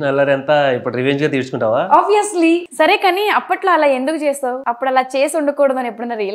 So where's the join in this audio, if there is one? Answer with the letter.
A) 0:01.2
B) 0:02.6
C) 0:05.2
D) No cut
B